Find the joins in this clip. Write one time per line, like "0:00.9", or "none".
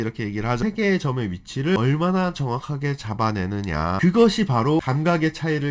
0:01.8
0:04.0
0:04.8